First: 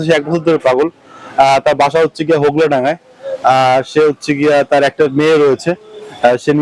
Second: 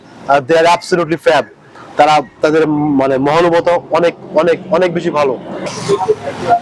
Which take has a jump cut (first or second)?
second